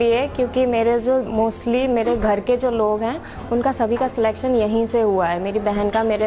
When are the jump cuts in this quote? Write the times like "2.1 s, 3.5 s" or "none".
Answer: none